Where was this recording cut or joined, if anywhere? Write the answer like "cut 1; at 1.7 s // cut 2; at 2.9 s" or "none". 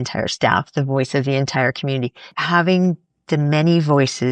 cut 1; at 2.3 s